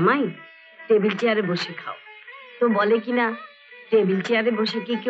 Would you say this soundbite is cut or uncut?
uncut